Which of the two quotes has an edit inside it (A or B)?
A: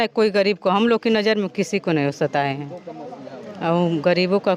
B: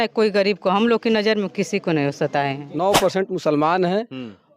B